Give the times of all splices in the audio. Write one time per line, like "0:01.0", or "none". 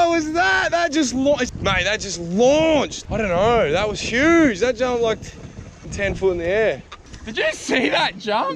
0:01.4
0:03.0